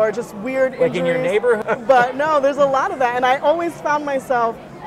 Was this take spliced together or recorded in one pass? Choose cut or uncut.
cut